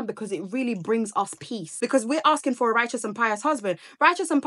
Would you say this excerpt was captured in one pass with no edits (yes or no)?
no